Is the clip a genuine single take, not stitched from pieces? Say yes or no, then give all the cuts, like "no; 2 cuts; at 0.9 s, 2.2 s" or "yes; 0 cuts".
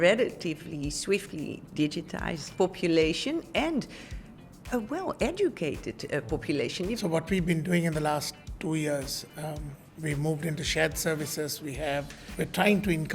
no; 3 cuts; at 2.5 s, 7.0 s, 12.2 s